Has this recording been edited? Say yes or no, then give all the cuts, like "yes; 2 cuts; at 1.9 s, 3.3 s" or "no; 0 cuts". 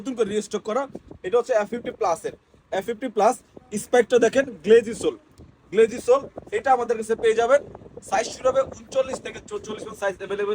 no; 0 cuts